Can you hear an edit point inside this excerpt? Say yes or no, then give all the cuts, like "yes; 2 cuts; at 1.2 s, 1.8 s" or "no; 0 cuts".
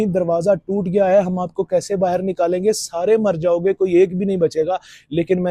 no; 0 cuts